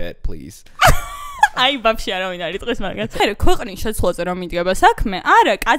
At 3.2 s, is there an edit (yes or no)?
yes